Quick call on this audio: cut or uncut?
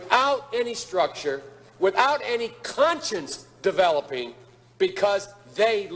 cut